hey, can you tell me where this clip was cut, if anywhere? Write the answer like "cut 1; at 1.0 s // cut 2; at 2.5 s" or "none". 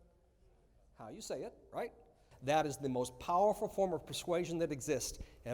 cut 1; at 2.2 s

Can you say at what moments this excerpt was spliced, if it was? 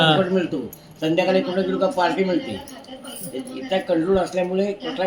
none

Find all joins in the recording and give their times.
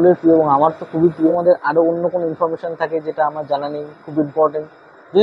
cut 1; at 1.3 s

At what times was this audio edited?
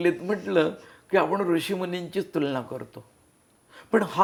none

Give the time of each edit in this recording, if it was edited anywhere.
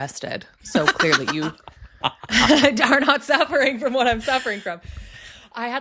none

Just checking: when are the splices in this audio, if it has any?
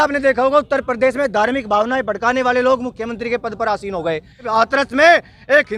cut 1; at 4.5 s

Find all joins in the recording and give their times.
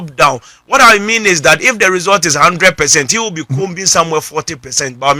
none

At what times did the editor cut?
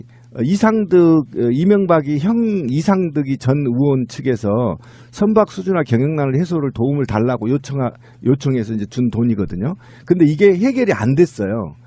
cut 1; at 4.9 s

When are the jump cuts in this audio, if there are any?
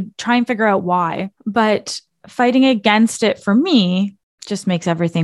cut 1; at 1.3 s // cut 2; at 4.3 s

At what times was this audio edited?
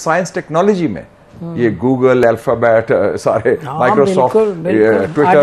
none

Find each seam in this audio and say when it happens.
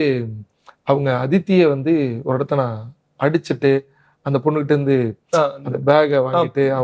none

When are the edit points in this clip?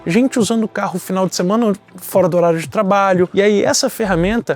cut 1; at 3.3 s

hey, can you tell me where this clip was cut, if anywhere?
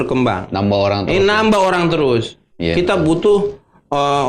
none

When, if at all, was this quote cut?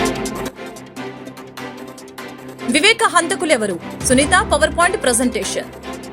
cut 1; at 1.1 s

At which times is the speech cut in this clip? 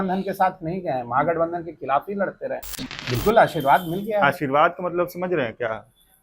cut 1; at 2.8 s

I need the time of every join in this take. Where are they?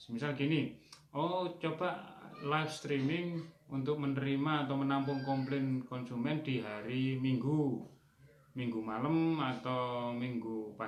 none

